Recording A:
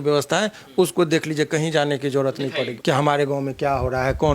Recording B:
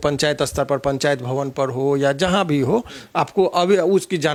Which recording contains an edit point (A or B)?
A